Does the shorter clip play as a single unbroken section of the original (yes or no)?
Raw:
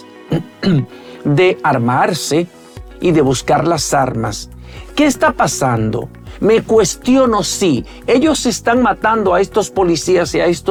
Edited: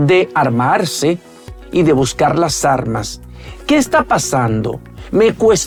yes